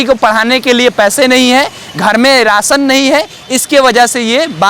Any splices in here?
no; 0 cuts

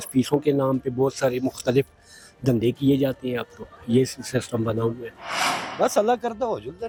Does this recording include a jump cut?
no; 0 cuts

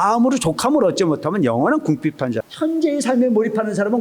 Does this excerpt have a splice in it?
yes; 1 cut; at 2.5 s

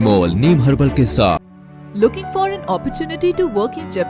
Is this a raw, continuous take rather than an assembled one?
no; 1 cut; at 1.5 s

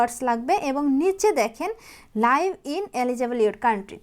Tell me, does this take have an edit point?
no; 0 cuts

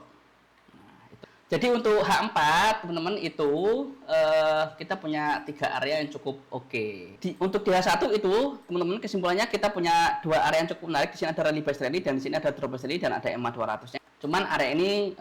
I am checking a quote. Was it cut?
yes; 3 cuts; at 1.2 s, 7.1 s, 13.9 s

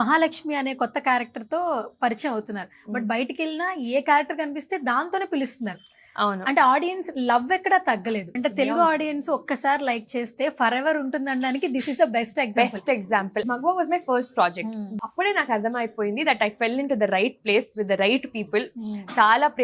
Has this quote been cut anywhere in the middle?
yes; 3 cuts; at 8.4 s, 13.4 s, 15.0 s

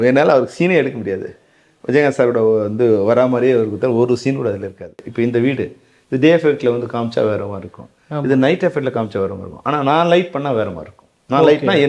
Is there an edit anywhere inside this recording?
yes; 1 cut; at 5.0 s

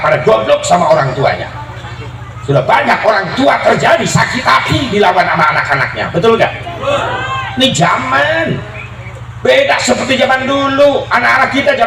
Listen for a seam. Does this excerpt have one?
no; 0 cuts

